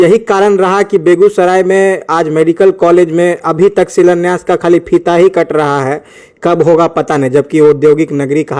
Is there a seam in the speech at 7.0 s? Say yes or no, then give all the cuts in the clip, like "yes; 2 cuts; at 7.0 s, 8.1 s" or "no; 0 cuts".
no; 0 cuts